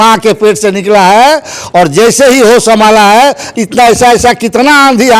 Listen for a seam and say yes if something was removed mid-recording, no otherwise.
no